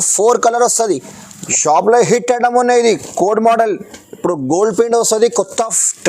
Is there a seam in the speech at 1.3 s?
yes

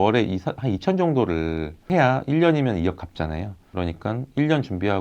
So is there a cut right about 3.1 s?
no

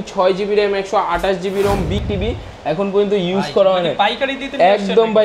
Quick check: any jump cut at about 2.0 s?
yes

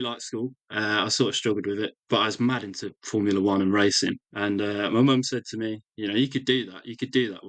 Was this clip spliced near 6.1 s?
no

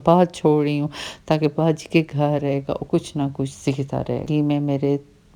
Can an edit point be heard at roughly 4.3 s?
yes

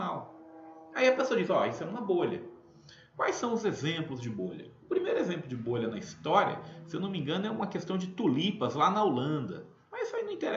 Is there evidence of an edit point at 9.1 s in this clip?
no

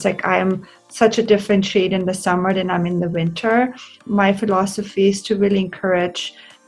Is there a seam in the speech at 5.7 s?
no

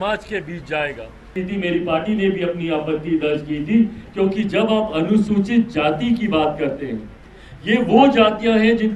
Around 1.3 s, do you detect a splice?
yes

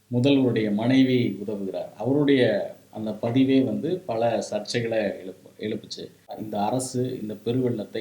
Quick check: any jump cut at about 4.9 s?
no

